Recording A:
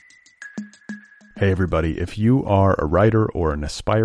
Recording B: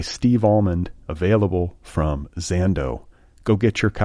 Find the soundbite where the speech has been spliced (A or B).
A